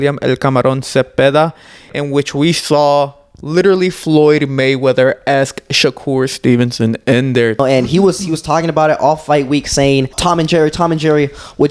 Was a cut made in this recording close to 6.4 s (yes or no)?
no